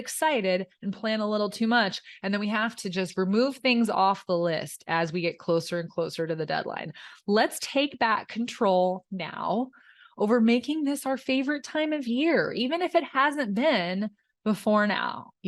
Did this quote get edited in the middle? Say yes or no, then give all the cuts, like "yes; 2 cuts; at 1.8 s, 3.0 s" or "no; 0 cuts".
no; 0 cuts